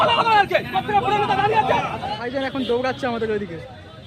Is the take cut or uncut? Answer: cut